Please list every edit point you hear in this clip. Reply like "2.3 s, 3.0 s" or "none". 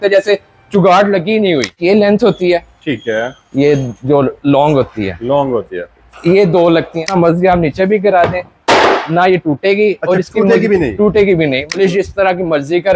1.8 s, 7.0 s, 11.8 s